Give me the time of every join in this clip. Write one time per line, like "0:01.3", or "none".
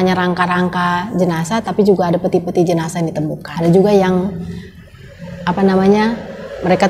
0:03.4